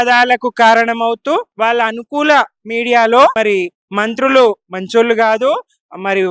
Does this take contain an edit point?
yes; 2 cuts; at 1.5 s, 3.3 s

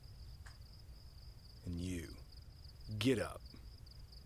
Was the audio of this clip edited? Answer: no; 0 cuts

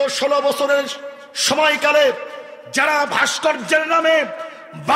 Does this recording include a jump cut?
no; 0 cuts

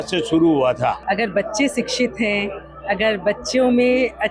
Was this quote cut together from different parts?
yes; 1 cut; at 1.0 s

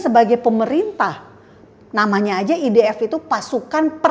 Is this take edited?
no; 0 cuts

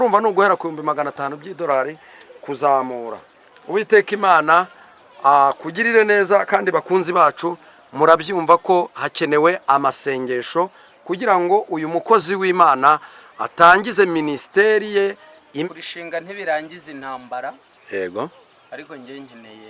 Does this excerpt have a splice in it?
yes; 1 cut; at 15.7 s

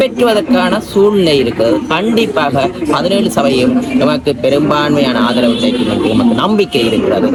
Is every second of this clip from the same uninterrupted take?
yes; 0 cuts

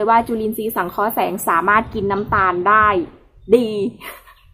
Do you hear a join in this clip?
no; 0 cuts

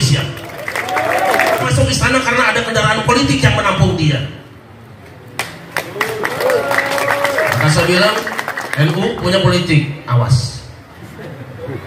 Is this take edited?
yes; 1 cut; at 1.7 s

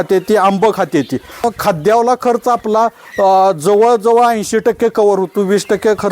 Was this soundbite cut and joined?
yes; 1 cut; at 1.4 s

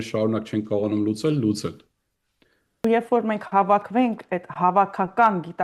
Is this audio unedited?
no; 1 cut; at 2.8 s

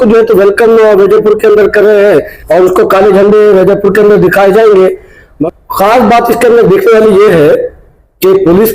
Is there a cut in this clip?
yes; 2 cuts; at 2.4 s, 5.3 s

